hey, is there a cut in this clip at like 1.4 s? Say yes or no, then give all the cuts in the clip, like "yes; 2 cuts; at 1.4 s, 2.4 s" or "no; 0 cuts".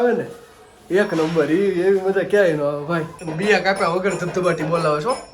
no; 1 cut; at 3.2 s